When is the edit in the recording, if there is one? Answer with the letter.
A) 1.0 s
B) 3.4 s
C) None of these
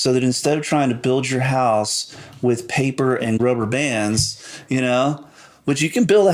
B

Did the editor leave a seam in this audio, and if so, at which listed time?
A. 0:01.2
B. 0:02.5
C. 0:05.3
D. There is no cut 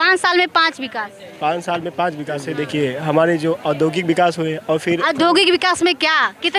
B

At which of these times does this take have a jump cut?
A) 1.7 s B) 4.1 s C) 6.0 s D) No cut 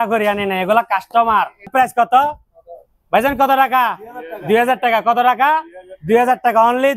A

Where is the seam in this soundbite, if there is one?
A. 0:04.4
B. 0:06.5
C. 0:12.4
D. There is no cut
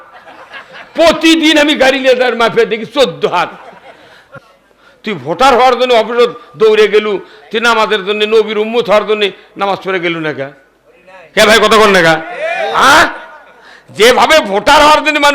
A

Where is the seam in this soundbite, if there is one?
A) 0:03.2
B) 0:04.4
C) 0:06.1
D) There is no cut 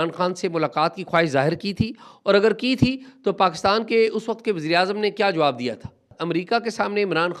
C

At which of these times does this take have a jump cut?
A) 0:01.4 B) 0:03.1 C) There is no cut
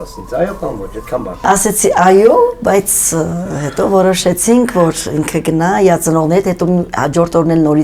A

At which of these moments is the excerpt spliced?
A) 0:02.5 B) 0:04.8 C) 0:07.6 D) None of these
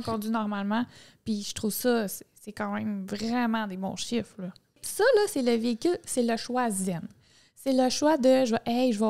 B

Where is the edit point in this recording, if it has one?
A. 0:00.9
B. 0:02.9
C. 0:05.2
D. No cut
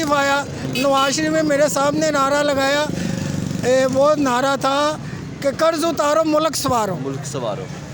D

